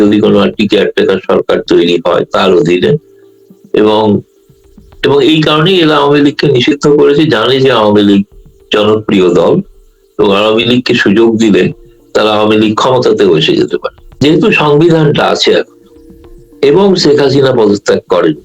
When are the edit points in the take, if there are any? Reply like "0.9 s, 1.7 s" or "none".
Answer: 14.2 s

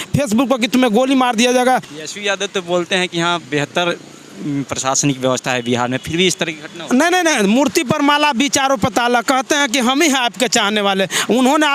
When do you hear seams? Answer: 1.9 s

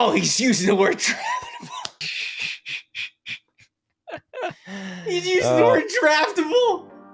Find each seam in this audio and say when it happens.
none

